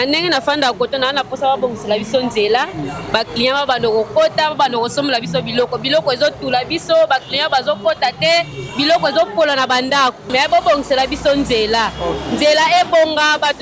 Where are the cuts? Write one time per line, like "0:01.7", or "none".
0:10.3